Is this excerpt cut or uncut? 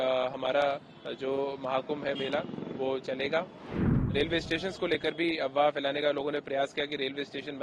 cut